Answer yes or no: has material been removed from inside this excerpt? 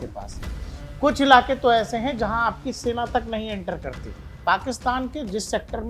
yes